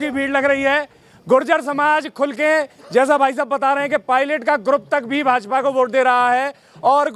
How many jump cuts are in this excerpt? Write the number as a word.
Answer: zero